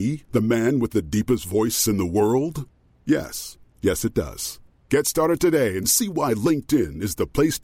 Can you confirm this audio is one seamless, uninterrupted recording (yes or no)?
yes